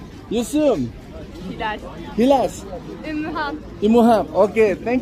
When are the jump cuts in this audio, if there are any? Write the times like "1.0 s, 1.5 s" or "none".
none